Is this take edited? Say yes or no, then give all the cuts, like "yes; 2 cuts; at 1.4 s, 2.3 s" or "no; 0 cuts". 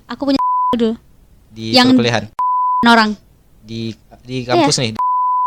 no; 0 cuts